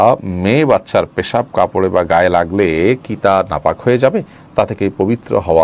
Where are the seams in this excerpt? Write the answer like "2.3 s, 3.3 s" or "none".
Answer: none